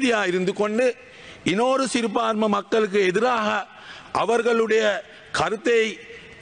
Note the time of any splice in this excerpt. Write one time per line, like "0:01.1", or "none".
none